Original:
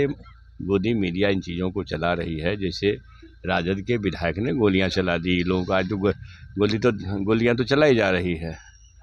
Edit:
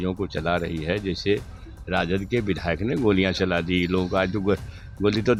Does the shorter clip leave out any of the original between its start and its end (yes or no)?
no